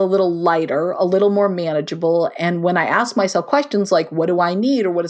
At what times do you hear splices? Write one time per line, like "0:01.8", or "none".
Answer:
none